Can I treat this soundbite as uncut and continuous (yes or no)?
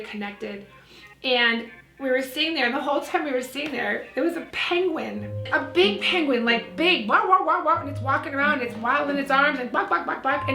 no